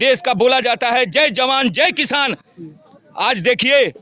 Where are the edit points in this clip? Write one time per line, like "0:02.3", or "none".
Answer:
none